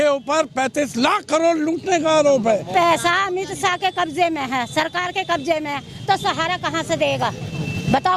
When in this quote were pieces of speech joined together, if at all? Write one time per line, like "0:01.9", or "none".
0:02.7

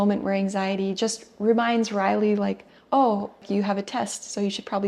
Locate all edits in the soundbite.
0:03.4

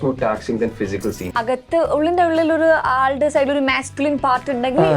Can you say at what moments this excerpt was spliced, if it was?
0:01.4

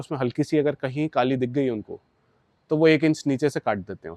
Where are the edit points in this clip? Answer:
none

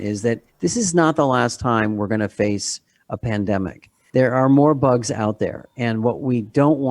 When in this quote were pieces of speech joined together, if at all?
none

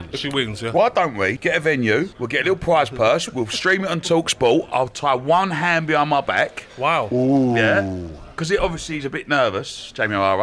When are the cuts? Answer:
0:01.4
0:02.2

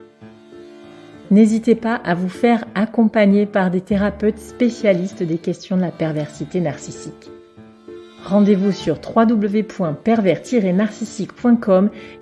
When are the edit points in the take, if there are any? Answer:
0:01.2

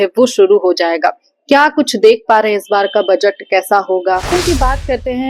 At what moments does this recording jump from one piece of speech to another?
0:04.3

